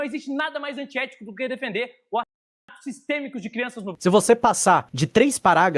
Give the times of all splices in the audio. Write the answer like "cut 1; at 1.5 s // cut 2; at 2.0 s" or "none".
cut 1; at 4.0 s